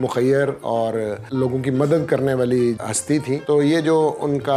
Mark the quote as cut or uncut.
cut